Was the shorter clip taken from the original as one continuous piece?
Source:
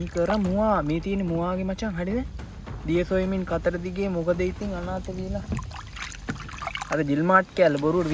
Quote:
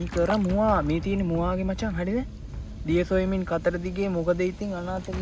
yes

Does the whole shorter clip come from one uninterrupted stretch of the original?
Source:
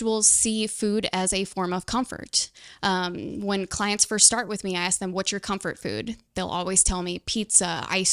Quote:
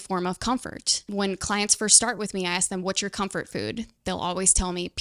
no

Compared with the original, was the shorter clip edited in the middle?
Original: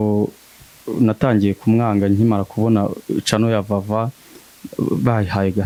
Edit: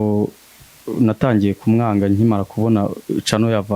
no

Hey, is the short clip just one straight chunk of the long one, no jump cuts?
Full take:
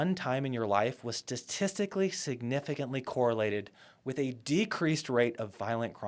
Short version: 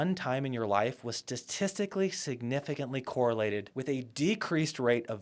no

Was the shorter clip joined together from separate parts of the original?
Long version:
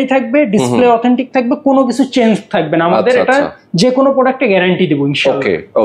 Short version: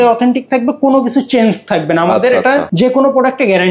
yes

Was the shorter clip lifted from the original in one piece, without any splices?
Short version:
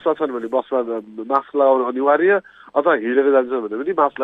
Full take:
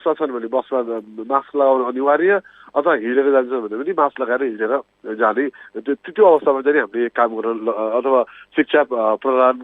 yes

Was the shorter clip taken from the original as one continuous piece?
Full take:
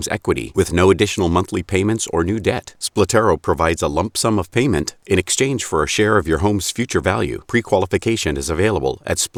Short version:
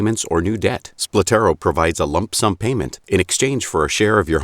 no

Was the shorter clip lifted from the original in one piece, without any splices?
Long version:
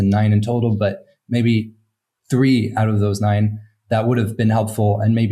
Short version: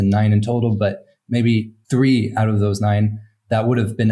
no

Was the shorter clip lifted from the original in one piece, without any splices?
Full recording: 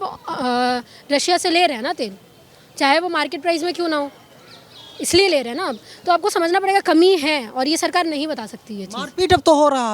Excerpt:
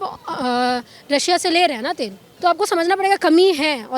no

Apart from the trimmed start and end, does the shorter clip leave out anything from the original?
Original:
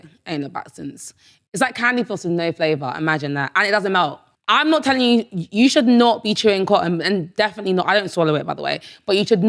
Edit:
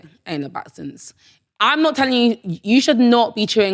yes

